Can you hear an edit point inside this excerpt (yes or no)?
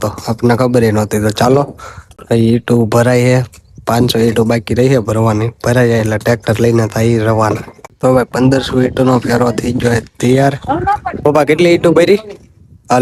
no